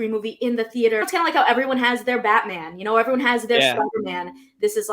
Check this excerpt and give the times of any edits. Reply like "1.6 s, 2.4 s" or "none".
1.1 s